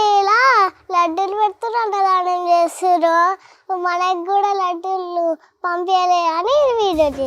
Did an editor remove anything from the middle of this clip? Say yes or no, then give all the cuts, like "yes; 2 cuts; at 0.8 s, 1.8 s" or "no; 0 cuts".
no; 0 cuts